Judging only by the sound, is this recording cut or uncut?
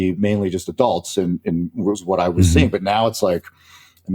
uncut